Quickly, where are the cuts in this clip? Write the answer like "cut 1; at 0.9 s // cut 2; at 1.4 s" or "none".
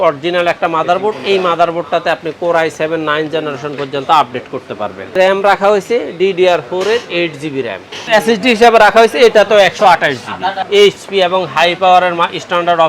cut 1; at 5.2 s // cut 2; at 8.1 s // cut 3; at 10.6 s